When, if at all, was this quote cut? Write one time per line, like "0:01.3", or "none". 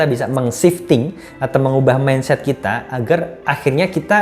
none

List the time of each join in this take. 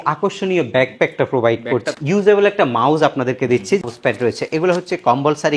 0:01.9
0:03.8

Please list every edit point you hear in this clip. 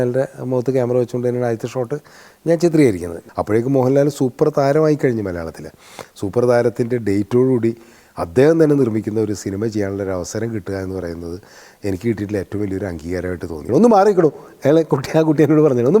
0:03.2
0:13.6

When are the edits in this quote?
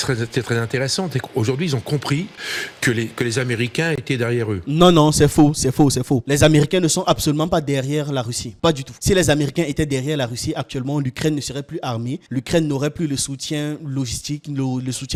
none

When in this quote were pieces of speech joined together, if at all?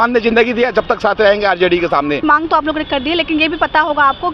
0:02.2

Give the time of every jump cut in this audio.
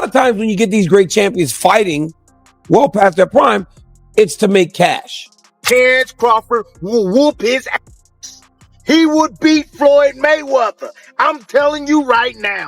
0:05.6

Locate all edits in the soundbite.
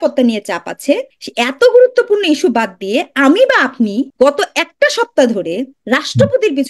0:01.2
0:04.1
0:05.7

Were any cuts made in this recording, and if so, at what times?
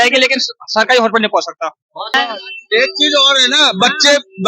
0:02.1

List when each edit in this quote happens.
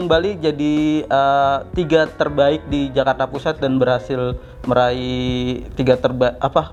none

